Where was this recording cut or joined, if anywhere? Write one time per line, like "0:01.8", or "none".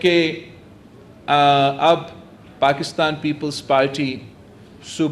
0:03.0